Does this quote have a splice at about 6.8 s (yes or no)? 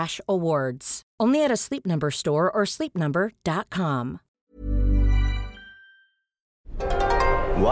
yes